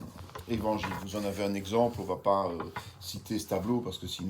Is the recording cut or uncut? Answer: cut